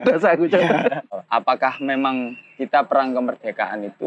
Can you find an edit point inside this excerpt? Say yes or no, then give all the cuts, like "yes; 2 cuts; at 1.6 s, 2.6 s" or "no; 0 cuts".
yes; 1 cut; at 1.2 s